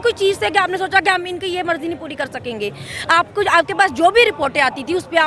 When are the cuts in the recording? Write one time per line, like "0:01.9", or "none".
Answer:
none